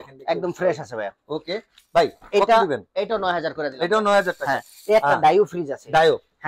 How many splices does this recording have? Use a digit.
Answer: 0